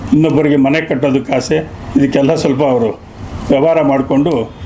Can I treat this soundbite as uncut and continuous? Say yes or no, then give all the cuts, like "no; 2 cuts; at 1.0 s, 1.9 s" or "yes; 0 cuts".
yes; 0 cuts